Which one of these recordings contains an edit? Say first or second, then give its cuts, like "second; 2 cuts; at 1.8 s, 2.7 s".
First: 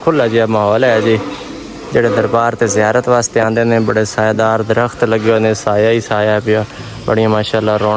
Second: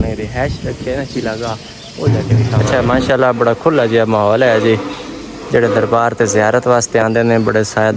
second; 1 cut; at 2.7 s